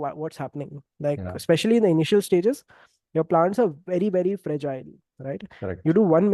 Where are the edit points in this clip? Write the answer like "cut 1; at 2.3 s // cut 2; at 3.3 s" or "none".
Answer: none